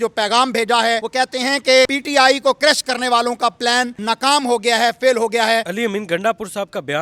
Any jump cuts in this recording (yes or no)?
yes